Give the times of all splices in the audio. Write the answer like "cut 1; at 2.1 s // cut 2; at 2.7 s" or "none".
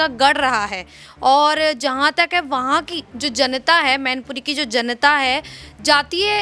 none